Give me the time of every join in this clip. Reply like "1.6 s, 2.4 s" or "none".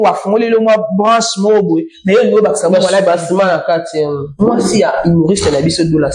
4.3 s